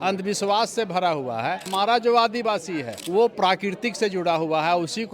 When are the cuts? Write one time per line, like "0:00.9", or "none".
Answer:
0:01.7
0:03.0